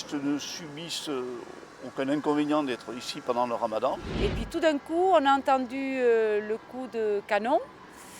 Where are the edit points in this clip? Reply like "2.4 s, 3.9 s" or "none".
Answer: 4.1 s